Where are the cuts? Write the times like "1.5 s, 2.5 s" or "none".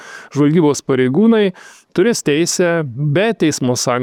none